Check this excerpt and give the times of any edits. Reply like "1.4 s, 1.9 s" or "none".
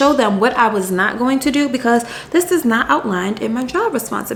none